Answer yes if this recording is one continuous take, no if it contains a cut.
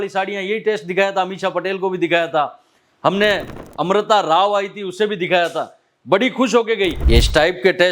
no